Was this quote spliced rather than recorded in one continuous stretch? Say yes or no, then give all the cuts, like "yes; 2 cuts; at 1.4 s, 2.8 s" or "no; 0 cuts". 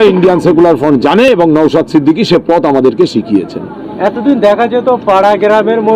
no; 0 cuts